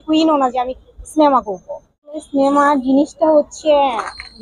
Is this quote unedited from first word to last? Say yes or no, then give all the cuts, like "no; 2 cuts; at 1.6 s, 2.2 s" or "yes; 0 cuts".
no; 1 cut; at 2.2 s